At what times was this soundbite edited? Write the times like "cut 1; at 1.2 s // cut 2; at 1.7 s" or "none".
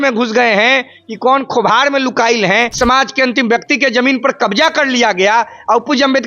cut 1; at 2.7 s

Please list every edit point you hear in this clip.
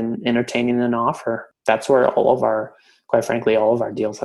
cut 1; at 1.5 s

